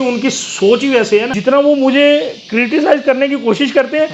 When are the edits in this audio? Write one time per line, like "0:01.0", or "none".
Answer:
0:01.3